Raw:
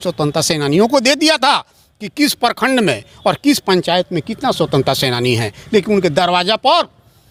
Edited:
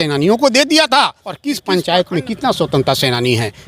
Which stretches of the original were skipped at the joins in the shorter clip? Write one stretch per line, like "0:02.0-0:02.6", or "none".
0:02.0-0:03.5